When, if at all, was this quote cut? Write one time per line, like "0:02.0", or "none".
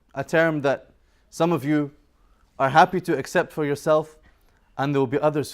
0:03.3